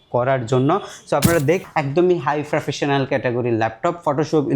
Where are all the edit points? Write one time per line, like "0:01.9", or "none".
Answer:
0:01.6